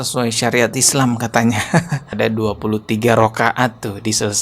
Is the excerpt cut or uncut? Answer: cut